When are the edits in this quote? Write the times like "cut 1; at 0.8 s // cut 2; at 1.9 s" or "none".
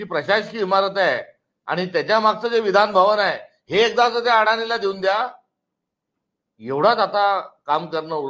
none